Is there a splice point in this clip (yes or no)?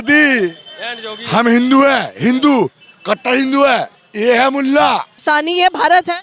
yes